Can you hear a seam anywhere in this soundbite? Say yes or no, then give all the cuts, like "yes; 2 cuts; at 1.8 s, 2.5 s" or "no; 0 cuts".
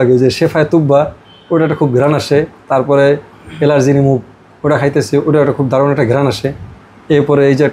no; 0 cuts